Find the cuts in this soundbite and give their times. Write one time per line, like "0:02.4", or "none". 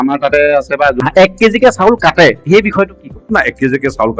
0:00.9